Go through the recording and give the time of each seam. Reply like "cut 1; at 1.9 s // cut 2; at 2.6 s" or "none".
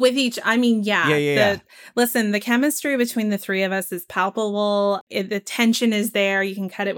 cut 1; at 5.0 s